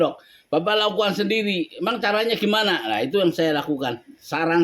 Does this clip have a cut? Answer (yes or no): no